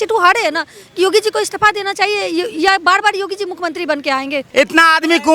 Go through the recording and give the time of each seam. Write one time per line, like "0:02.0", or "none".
0:04.5